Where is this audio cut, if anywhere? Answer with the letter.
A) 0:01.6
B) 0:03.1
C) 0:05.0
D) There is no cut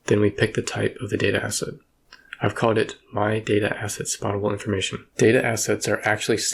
C